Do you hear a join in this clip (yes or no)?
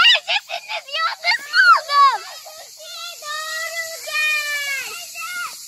no